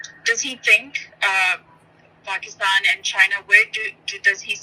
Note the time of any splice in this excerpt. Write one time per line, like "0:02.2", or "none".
none